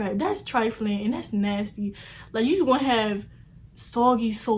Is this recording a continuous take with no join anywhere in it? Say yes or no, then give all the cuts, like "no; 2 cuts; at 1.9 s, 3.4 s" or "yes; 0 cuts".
yes; 0 cuts